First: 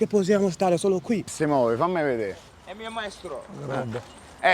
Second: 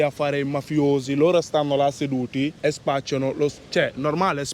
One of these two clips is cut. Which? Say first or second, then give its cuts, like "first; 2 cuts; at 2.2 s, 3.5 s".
first; 1 cut; at 1.4 s